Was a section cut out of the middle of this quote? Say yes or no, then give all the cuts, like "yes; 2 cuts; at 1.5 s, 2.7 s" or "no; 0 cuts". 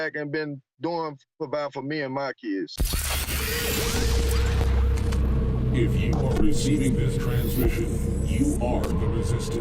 yes; 1 cut; at 2.7 s